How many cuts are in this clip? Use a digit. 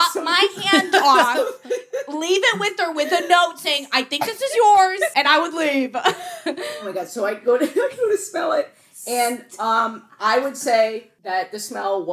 3